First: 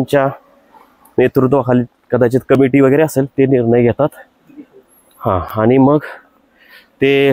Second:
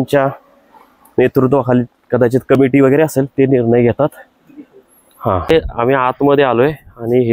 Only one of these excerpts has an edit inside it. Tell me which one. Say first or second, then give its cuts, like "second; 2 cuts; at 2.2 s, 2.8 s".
second; 1 cut; at 5.5 s